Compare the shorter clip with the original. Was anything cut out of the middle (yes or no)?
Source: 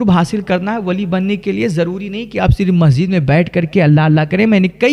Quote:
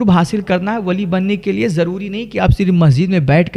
no